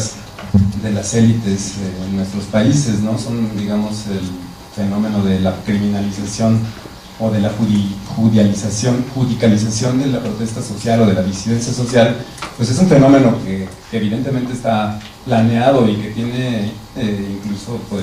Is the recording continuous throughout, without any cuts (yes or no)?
yes